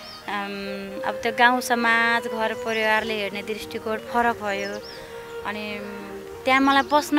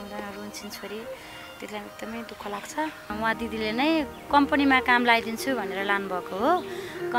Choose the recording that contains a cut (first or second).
second